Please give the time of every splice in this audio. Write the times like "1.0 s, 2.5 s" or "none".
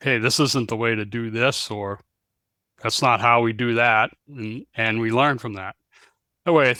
none